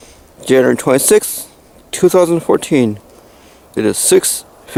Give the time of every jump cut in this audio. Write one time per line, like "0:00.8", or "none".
none